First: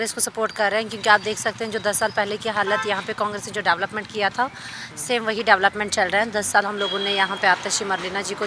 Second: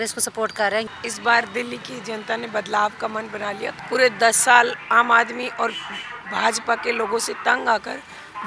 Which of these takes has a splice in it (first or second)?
second